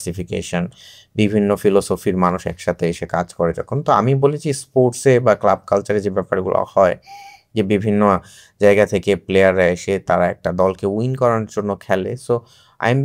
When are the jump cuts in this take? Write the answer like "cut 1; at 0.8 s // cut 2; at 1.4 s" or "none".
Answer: none